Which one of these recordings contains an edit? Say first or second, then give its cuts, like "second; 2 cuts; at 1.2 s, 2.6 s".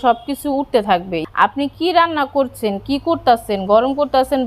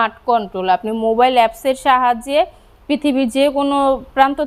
first; 1 cut; at 1.2 s